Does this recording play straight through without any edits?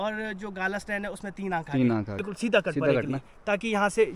no; 1 cut; at 2.2 s

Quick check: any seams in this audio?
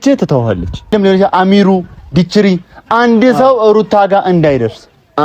yes; 1 cut; at 0.9 s

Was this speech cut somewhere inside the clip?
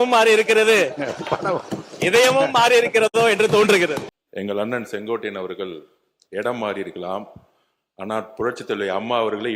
yes; 1 cut; at 4.2 s

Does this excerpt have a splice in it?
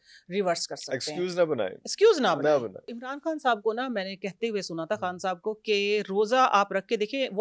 yes; 1 cut; at 3.0 s

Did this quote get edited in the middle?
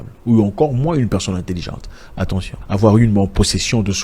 yes; 1 cut; at 2.6 s

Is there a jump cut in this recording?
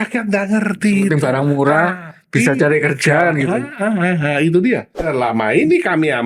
yes; 1 cut; at 5.1 s

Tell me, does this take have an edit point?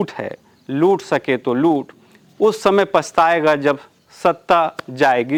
no; 0 cuts

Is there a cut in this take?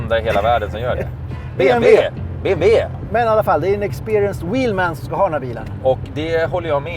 yes; 1 cut; at 3.0 s

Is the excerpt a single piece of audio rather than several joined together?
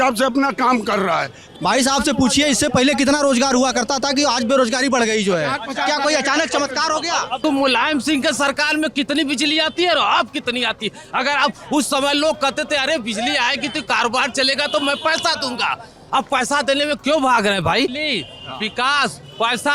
no; 3 cuts; at 1.5 s, 7.3 s, 18.0 s

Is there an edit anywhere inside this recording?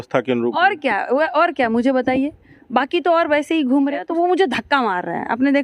yes; 1 cut; at 4.0 s

